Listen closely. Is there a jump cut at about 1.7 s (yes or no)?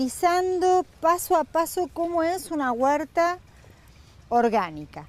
yes